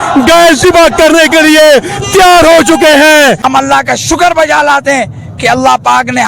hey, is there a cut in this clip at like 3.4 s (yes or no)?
yes